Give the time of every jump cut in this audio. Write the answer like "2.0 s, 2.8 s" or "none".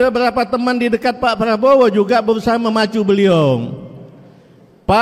none